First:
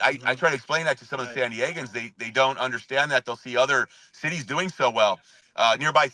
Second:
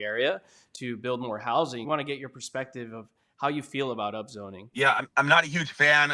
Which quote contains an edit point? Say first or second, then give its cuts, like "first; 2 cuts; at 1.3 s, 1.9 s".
second; 1 cut; at 1.9 s